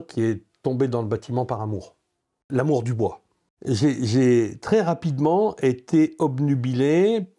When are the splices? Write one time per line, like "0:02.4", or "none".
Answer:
0:02.4
0:03.5